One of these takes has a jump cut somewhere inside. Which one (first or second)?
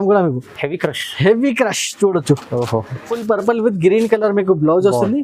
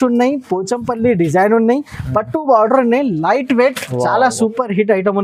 first